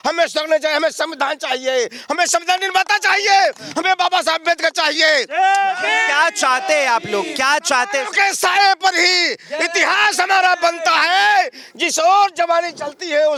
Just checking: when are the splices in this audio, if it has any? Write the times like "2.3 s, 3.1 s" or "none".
none